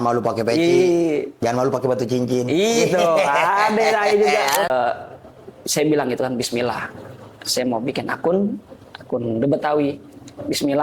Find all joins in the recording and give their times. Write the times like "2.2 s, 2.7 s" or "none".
4.7 s